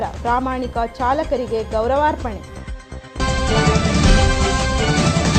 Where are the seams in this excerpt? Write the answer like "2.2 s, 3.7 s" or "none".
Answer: 3.1 s